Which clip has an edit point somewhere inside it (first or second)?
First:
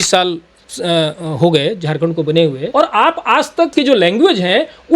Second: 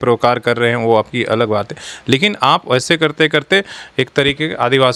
first